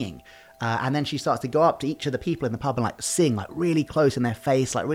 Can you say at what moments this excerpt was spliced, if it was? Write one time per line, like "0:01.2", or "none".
none